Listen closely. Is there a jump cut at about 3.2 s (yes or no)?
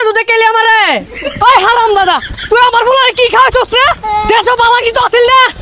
no